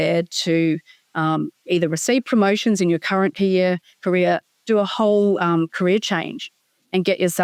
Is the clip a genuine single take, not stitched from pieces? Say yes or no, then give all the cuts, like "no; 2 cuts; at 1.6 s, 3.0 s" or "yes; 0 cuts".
yes; 0 cuts